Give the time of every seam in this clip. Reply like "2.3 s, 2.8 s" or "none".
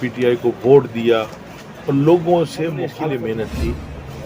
2.9 s